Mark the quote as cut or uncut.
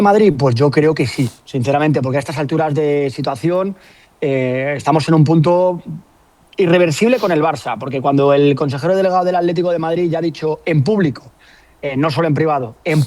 uncut